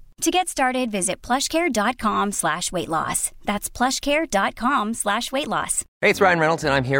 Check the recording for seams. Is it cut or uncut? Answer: cut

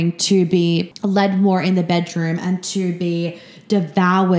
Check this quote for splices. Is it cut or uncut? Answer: cut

